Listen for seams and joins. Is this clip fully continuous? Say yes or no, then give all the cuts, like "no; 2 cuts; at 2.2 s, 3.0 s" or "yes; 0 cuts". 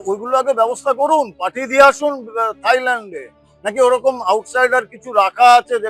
yes; 0 cuts